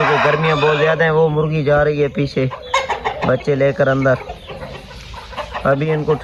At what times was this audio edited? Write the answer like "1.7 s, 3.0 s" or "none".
none